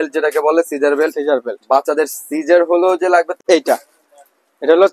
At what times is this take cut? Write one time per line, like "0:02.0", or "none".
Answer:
0:03.3